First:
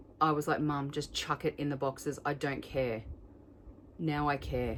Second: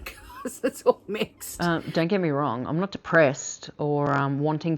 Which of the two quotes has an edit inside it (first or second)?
second